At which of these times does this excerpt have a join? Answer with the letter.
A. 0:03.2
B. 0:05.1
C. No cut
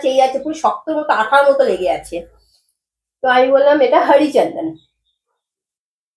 C